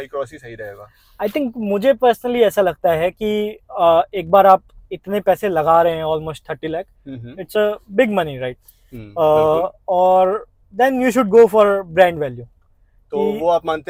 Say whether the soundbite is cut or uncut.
uncut